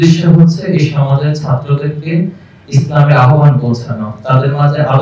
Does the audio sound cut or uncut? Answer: uncut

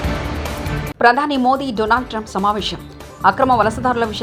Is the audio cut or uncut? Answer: uncut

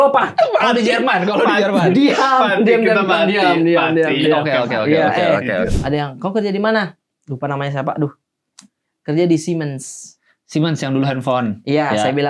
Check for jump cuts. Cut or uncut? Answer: cut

